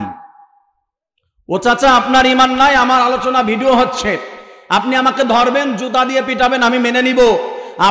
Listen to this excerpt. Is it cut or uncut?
uncut